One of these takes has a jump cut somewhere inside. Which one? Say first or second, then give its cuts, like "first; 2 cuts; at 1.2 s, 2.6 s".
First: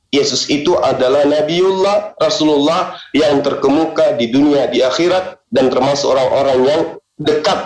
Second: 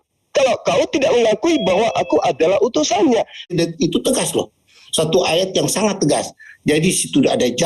second; 1 cut; at 3.5 s